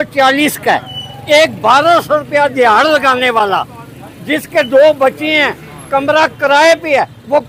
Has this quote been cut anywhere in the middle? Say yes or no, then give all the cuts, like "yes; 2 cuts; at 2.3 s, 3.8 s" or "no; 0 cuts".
no; 0 cuts